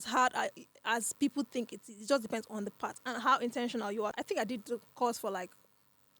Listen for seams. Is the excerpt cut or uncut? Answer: cut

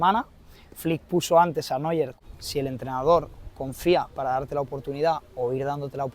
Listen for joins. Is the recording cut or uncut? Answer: cut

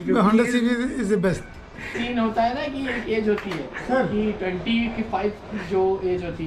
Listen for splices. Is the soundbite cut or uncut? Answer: cut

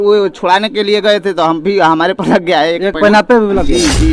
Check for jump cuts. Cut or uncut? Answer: uncut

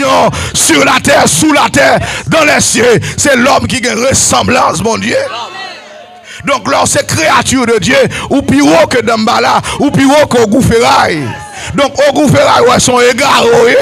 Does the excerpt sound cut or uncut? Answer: uncut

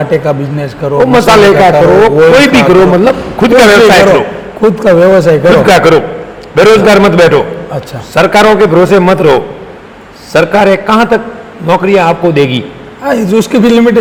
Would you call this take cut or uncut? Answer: uncut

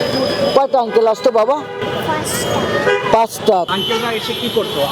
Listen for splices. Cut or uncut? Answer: cut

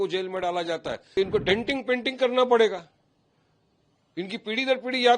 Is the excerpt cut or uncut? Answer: cut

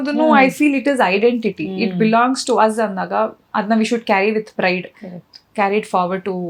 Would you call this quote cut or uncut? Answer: uncut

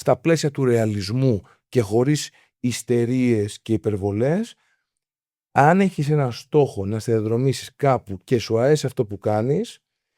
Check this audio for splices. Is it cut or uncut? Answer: uncut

